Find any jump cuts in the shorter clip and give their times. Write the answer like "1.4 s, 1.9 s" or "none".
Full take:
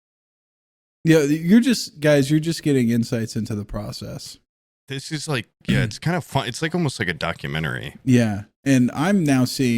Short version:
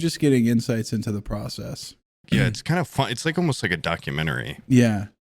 2.2 s